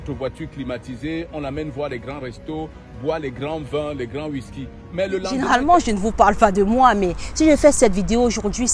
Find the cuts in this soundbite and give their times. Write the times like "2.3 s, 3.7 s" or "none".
5.3 s